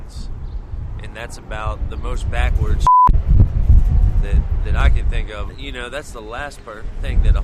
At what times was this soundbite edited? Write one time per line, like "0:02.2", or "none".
0:05.6